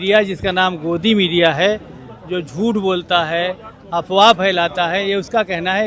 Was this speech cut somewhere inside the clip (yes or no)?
no